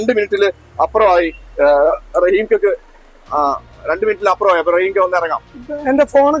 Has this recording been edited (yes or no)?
no